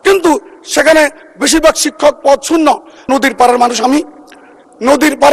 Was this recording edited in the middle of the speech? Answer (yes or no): yes